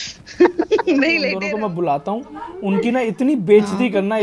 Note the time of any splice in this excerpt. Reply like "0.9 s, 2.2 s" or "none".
1.3 s